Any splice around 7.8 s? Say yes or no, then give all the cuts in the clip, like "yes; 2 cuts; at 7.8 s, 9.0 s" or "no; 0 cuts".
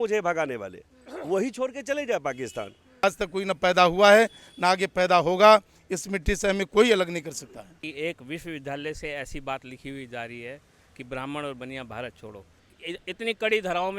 yes; 3 cuts; at 3.0 s, 7.8 s, 12.7 s